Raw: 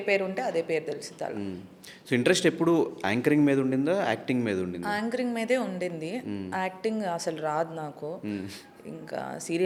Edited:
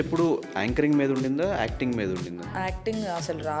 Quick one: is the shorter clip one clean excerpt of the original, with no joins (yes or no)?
no